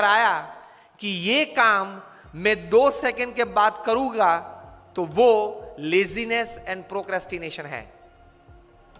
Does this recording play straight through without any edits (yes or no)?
yes